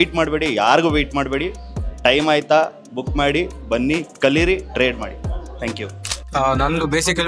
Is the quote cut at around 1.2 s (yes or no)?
no